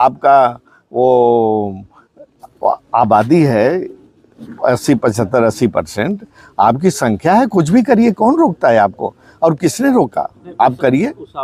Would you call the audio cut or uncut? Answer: uncut